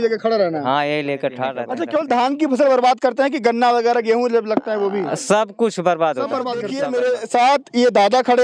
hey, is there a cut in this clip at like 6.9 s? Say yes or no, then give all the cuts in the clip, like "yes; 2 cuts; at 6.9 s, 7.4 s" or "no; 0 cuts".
yes; 2 cuts; at 1.7 s, 6.9 s